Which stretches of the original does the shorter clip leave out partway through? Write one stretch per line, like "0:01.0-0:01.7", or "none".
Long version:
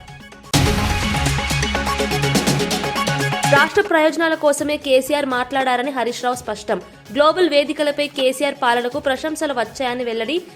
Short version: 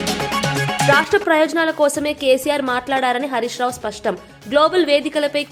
none